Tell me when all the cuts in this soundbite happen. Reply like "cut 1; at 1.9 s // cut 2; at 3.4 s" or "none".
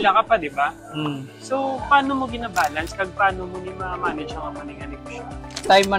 none